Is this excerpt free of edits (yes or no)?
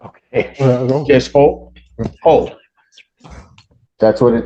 yes